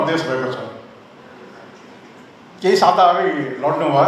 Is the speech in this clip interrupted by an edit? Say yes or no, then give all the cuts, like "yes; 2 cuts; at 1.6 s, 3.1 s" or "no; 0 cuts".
no; 0 cuts